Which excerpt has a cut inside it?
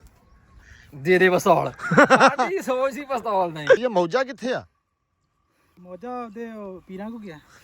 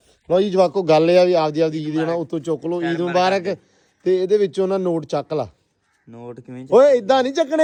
first; 1 cut; at 3.9 s

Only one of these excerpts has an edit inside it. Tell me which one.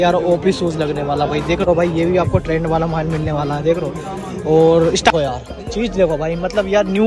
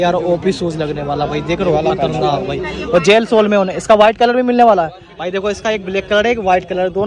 first; 2 cuts; at 1.7 s, 5.1 s

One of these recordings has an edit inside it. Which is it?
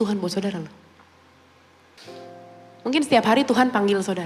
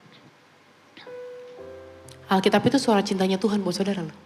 first; 1 cut; at 1.9 s

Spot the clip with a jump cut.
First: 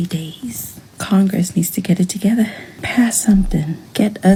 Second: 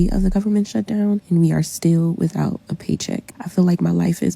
second; 2 cuts; at 1.2 s, 3.2 s

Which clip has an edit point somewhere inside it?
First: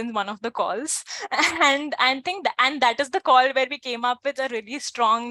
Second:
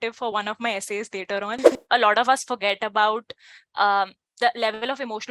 second; 1 cut; at 1.7 s

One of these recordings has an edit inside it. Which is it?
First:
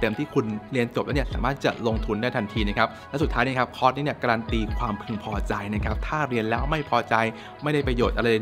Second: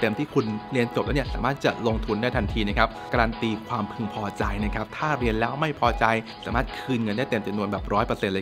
second; 2 cuts; at 3.1 s, 6.4 s

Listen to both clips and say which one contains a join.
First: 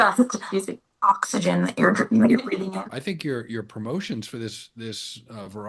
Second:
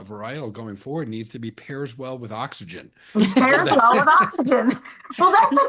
first; 1 cut; at 2.7 s

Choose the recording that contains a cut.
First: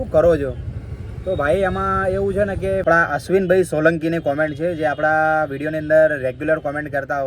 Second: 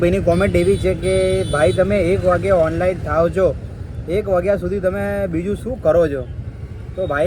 first; 1 cut; at 2.8 s

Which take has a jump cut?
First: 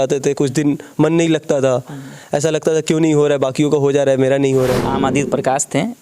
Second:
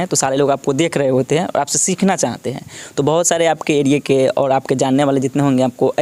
first; 1 cut; at 4.9 s

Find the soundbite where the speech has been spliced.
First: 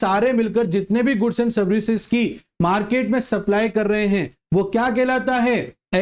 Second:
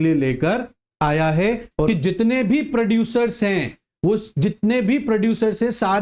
second; 1 cut; at 1.9 s

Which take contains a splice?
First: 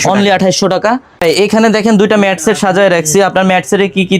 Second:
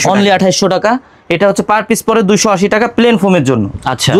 first; 1 cut; at 1.1 s

